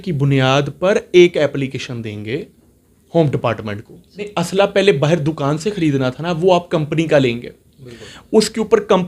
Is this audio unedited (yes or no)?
no